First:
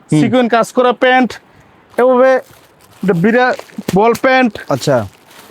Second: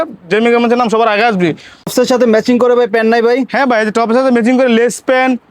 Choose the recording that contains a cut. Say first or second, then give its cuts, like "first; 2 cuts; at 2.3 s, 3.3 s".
second; 1 cut; at 1.9 s